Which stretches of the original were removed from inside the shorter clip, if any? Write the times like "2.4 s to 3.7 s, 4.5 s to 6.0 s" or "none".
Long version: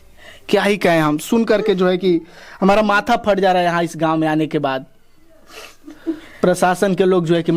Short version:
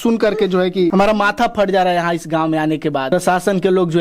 2.2 s to 2.6 s, 4.8 s to 6.5 s